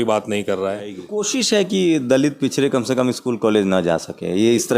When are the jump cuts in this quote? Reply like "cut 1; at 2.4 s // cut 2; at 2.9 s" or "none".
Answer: cut 1; at 1.1 s

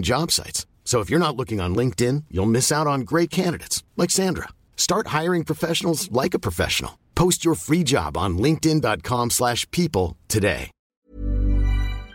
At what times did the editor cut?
cut 1; at 10.9 s

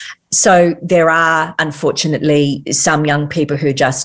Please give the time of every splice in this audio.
cut 1; at 1.6 s // cut 2; at 2.7 s

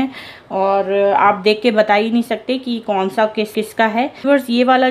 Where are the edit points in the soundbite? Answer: cut 1; at 3.5 s

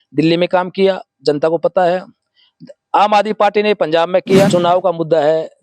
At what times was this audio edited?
cut 1; at 4.5 s

